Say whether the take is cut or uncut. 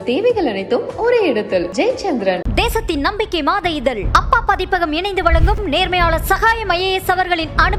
uncut